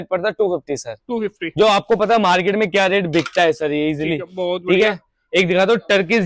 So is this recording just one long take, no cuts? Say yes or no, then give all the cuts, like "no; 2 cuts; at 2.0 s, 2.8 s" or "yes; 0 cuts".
yes; 0 cuts